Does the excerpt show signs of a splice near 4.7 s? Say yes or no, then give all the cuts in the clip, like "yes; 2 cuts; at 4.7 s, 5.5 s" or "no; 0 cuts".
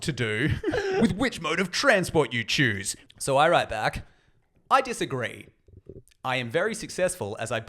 no; 2 cuts; at 1.0 s, 2.9 s